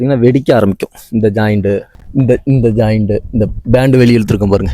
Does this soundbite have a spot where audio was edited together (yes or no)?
yes